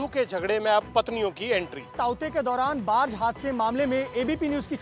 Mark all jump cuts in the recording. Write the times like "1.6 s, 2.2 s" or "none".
1.9 s